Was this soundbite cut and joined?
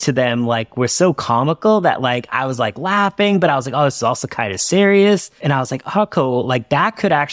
yes; 1 cut; at 5.4 s

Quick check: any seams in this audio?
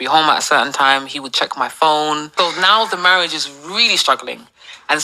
yes; 1 cut; at 2.3 s

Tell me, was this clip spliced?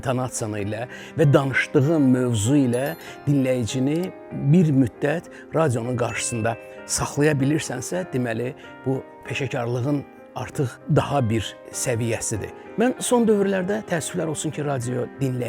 yes; 3 cuts; at 9.2 s, 10.8 s, 12.6 s

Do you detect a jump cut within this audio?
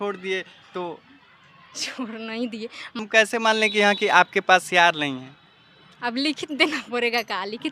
yes; 1 cut; at 3.0 s

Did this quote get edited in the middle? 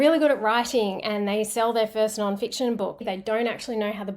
yes; 1 cut; at 3.0 s

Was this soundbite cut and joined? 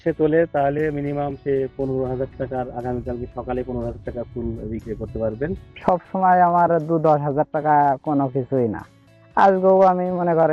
yes; 1 cut; at 5.6 s

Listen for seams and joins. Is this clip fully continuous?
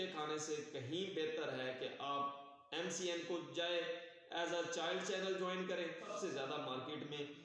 no; 1 cut; at 6.1 s

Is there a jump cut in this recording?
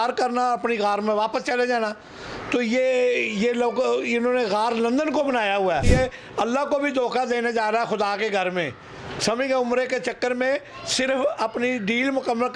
yes; 1 cut; at 5.9 s

